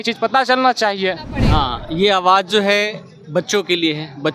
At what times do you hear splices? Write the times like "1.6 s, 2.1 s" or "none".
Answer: 1.4 s